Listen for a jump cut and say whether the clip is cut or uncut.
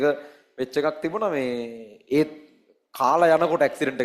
uncut